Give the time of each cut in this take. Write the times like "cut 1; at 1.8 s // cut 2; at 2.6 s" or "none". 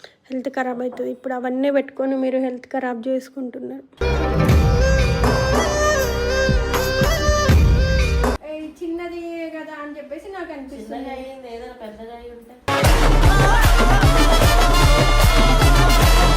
cut 1; at 8.4 s